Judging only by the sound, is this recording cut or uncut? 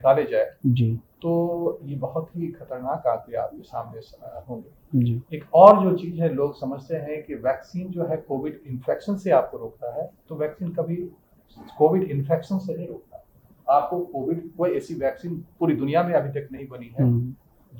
uncut